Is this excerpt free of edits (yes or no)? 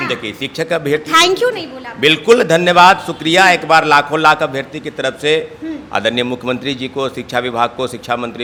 yes